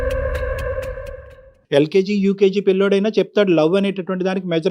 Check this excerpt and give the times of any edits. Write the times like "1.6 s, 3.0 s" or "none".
none